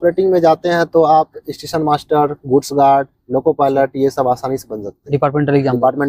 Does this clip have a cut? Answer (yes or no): no